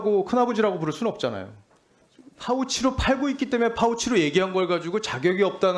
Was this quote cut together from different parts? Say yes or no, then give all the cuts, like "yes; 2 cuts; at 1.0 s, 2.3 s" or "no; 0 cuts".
yes; 1 cut; at 2.0 s